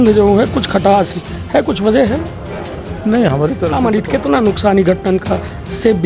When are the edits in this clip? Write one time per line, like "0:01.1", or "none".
0:03.7